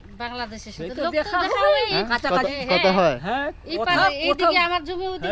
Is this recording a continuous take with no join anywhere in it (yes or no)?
yes